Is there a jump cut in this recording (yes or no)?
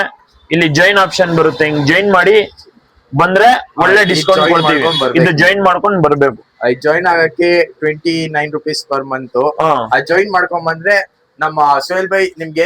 no